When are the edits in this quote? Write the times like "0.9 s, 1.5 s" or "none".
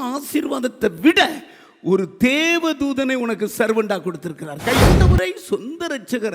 4.9 s

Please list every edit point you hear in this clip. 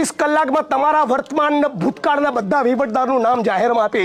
none

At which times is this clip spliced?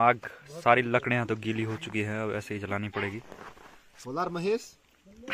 none

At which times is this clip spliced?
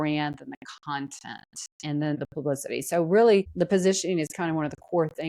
2.2 s

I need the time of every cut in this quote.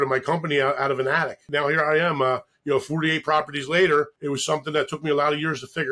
1.4 s, 4.2 s

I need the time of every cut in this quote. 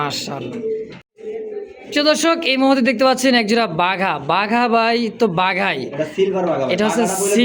1.1 s

